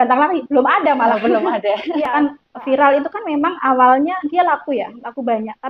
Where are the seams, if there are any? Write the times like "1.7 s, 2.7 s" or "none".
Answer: 2.1 s